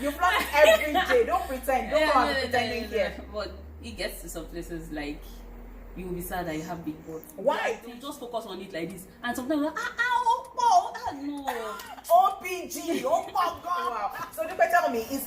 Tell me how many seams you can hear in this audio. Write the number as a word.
two